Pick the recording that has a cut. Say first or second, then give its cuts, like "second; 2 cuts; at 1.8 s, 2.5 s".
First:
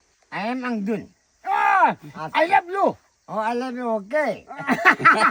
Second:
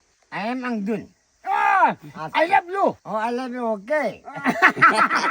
second; 1 cut; at 3.0 s